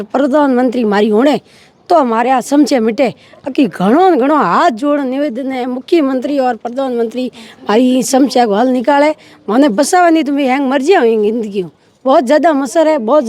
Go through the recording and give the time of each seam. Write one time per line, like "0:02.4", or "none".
none